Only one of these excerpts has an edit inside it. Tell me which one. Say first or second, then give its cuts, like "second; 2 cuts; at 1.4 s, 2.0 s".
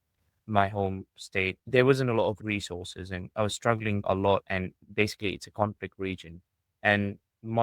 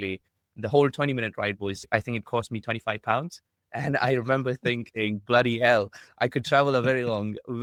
first; 3 cuts; at 1.6 s, 2.4 s, 4.0 s